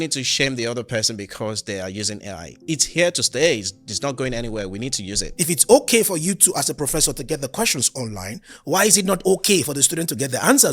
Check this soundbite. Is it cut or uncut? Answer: cut